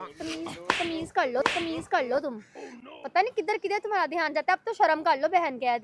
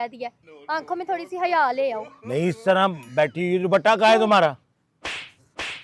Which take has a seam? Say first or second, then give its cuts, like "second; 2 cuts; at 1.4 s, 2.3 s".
second; 1 cut; at 2.1 s